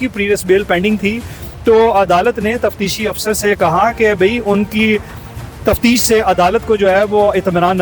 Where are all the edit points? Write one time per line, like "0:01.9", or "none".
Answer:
none